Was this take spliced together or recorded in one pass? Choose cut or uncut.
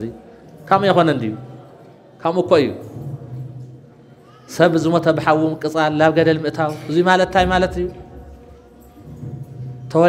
uncut